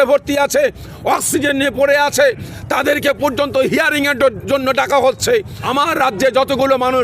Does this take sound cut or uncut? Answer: cut